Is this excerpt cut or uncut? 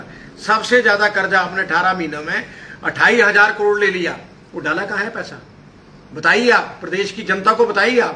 uncut